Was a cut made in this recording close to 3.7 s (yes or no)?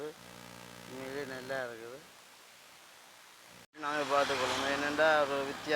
yes